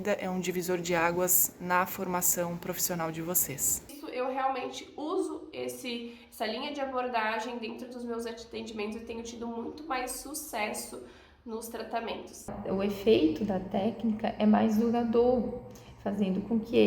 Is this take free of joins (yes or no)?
no